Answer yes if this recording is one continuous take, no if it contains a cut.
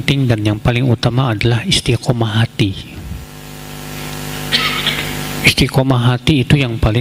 yes